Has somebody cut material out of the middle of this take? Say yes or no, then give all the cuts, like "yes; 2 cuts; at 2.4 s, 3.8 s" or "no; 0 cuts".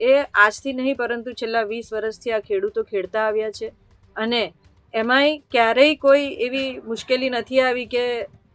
no; 0 cuts